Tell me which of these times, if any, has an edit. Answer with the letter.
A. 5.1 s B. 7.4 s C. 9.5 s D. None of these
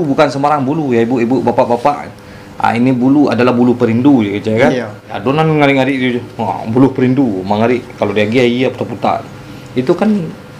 A